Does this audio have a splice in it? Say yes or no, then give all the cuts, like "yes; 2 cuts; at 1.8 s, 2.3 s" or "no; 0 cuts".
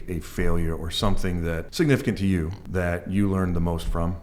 yes; 2 cuts; at 1.7 s, 2.6 s